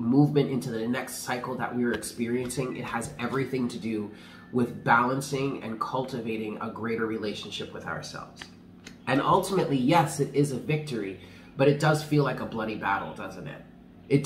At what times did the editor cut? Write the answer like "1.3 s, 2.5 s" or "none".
none